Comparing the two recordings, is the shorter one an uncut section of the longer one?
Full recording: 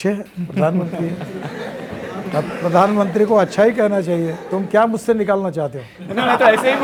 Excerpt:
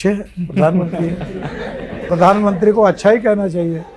no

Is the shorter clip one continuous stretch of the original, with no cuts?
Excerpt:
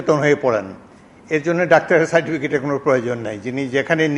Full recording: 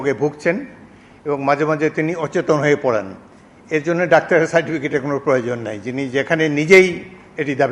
yes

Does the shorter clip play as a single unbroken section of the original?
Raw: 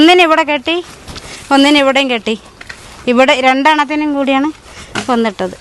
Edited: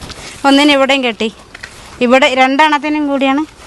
yes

